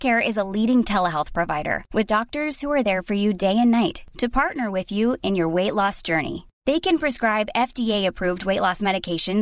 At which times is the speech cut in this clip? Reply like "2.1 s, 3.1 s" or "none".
none